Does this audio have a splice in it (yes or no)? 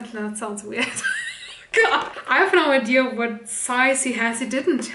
yes